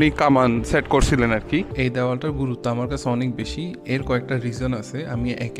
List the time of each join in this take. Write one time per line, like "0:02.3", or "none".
0:01.7